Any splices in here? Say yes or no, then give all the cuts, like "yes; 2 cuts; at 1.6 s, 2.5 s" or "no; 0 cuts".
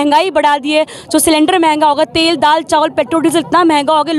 no; 0 cuts